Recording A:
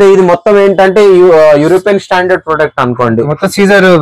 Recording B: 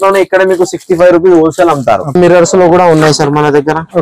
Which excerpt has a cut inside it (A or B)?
B